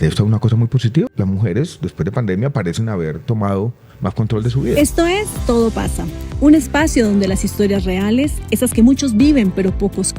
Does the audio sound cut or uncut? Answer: cut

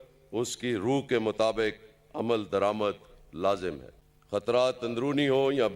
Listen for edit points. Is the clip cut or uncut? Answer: cut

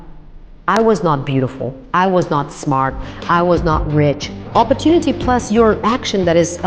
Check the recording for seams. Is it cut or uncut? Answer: cut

